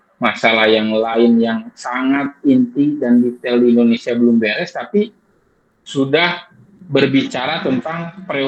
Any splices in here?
no; 0 cuts

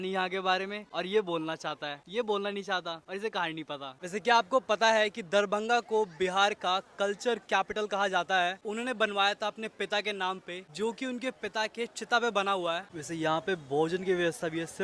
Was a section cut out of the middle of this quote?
yes; 3 cuts; at 3.9 s, 8.6 s, 12.9 s

